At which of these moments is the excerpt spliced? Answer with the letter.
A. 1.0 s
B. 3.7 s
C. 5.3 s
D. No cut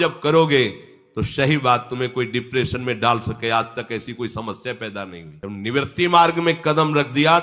C